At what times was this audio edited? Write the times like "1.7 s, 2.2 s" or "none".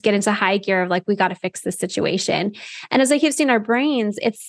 none